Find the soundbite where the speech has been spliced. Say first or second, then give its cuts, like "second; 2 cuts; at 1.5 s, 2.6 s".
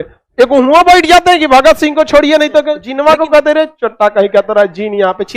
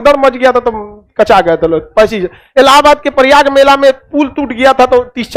first; 1 cut; at 2.8 s